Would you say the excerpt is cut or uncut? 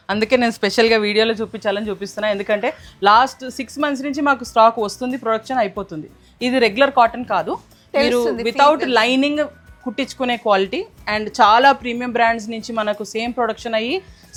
uncut